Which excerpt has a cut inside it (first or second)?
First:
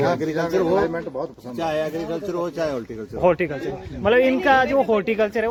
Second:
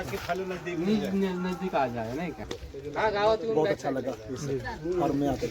second